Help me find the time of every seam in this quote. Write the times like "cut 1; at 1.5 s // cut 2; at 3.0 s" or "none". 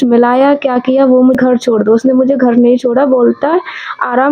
cut 1; at 1.4 s